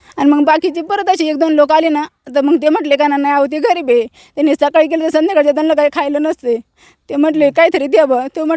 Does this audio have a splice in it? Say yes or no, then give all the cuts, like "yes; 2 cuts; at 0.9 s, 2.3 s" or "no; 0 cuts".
no; 0 cuts